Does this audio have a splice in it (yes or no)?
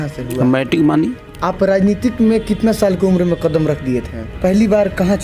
yes